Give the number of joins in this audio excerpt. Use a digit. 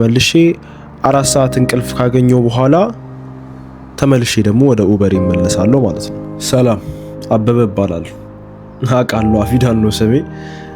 1